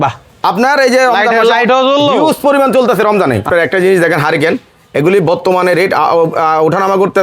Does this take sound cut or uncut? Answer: cut